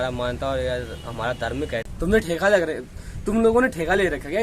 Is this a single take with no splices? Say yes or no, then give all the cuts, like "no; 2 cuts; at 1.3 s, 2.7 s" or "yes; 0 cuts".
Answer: no; 1 cut; at 1.9 s